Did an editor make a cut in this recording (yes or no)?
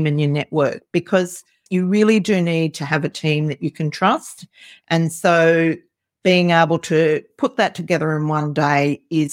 yes